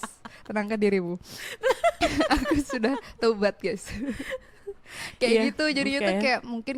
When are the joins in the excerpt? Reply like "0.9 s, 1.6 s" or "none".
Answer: none

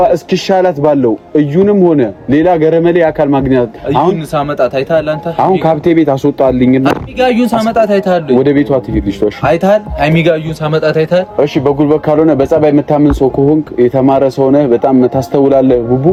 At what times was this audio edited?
none

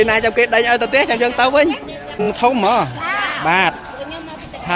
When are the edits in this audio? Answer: 2.3 s

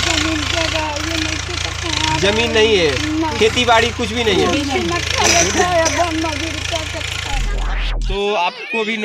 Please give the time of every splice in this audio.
7.6 s

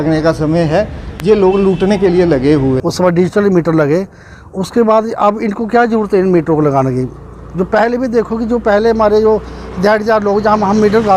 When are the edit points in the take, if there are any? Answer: 2.8 s

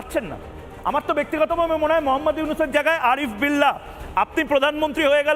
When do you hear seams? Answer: none

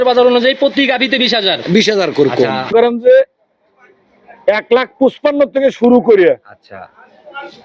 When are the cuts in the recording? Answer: 2.7 s

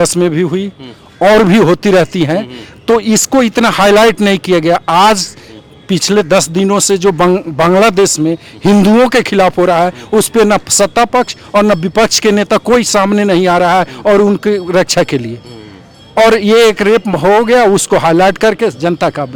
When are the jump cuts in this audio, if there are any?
none

